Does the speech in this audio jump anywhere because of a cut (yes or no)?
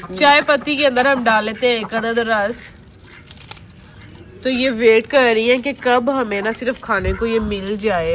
no